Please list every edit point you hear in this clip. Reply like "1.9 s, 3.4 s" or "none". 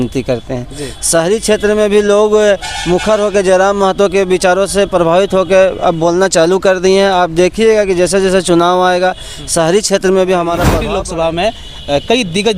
10.8 s